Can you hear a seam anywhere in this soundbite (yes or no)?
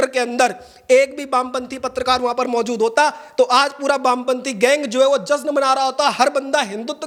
no